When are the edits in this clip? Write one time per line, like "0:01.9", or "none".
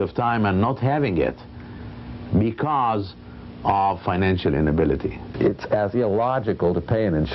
0:05.3